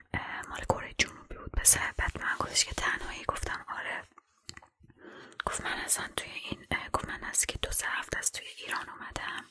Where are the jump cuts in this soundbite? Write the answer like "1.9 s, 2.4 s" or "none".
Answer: 1.9 s

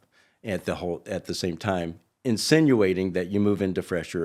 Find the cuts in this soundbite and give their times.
none

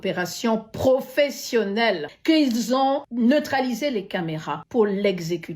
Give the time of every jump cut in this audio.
2.1 s, 3.1 s, 4.5 s

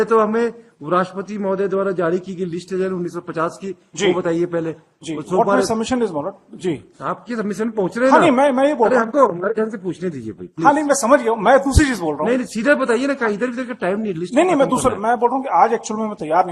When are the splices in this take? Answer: none

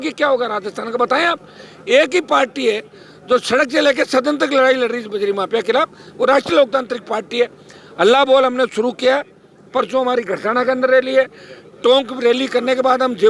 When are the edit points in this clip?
none

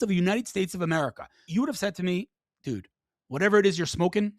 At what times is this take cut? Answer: 1.2 s

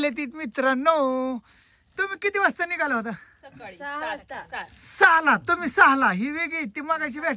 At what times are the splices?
none

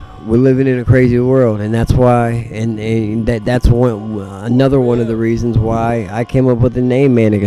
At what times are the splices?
none

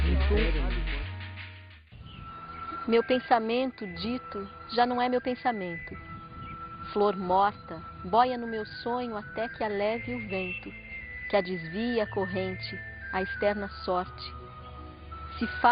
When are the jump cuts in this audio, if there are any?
none

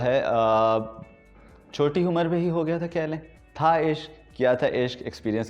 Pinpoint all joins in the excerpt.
3.3 s

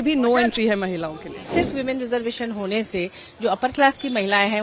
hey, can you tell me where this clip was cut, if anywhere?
1.5 s

